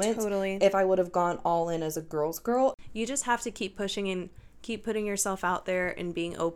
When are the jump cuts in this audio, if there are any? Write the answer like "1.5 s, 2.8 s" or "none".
2.7 s

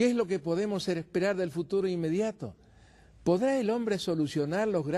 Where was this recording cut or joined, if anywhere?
2.4 s

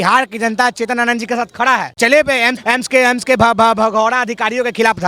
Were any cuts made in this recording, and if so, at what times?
1.9 s, 2.6 s

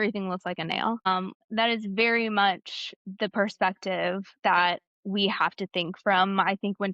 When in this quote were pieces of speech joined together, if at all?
1.1 s

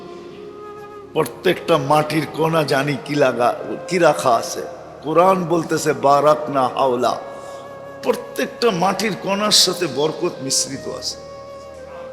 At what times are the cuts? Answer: 11.2 s

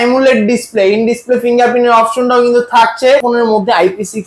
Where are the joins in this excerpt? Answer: 3.2 s

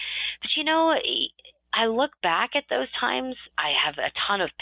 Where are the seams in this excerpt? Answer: 3.5 s

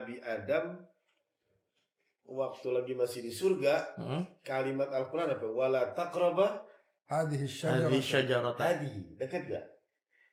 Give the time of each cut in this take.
none

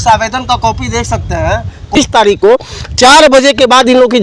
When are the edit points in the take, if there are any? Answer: 2.0 s

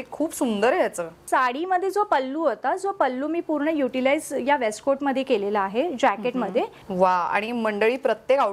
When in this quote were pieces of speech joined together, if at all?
1.2 s, 6.8 s

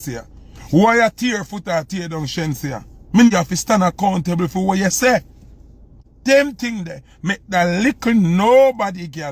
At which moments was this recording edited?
3.3 s, 6.0 s

